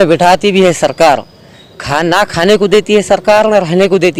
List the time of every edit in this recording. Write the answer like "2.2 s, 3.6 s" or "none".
none

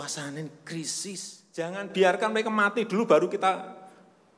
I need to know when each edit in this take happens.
1.7 s

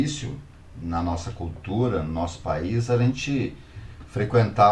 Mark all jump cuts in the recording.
none

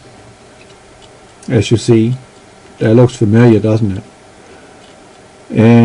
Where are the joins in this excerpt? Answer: 4.7 s

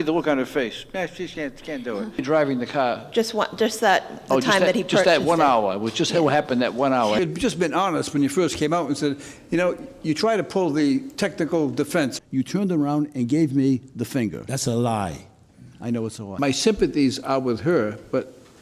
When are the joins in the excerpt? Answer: 2.2 s, 7.2 s, 12.2 s, 16.4 s

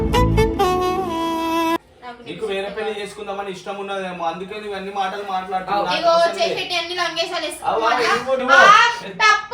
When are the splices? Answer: none

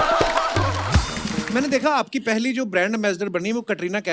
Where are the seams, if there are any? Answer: 1.5 s

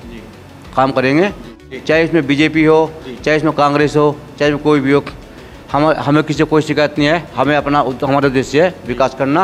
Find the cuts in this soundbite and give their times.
1.7 s

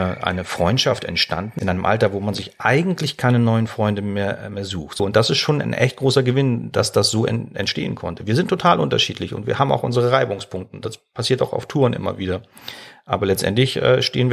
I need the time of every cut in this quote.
1.5 s, 5.0 s

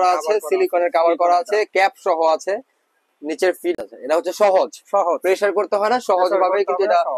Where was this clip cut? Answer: 3.7 s

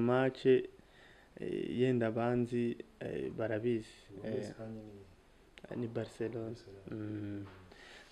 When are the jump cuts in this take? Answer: none

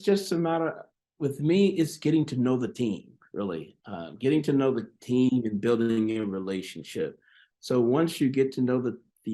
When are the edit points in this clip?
none

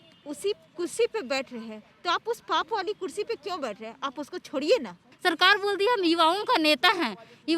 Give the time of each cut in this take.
5.1 s

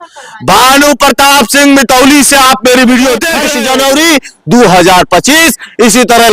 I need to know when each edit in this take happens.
3.4 s

